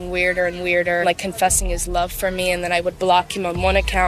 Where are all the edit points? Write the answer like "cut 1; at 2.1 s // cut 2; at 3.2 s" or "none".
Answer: cut 1; at 1.0 s